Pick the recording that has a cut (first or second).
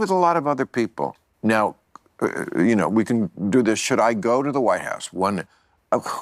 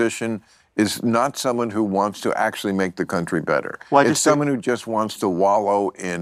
first